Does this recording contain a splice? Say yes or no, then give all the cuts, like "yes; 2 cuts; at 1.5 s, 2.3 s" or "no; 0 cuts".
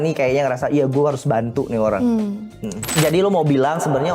yes; 1 cut; at 2.9 s